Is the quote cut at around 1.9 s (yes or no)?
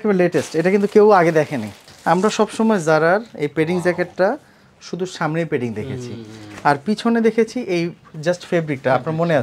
yes